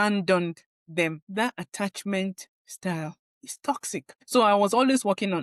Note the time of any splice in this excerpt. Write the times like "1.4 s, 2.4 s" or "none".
1.2 s, 4.2 s